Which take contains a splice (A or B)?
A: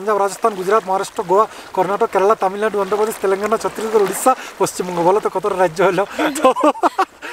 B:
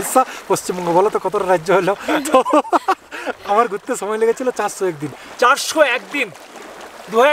B